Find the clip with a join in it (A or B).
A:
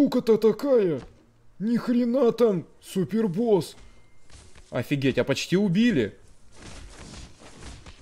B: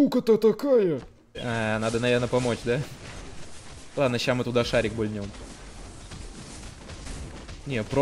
B